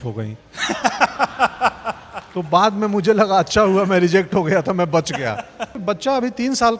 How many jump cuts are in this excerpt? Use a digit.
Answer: 1